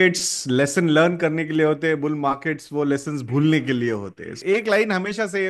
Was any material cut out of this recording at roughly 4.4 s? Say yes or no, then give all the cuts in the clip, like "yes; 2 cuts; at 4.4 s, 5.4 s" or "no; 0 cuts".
yes; 1 cut; at 4.4 s